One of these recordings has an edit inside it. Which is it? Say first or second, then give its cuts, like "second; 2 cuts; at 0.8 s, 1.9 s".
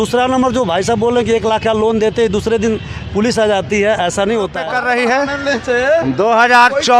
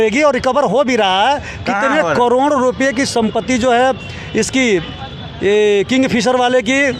first; 1 cut; at 4.6 s